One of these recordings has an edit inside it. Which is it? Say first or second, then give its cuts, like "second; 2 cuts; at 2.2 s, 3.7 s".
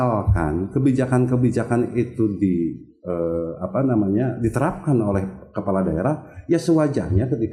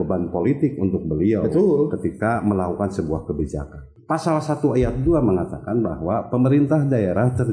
second; 1 cut; at 3.9 s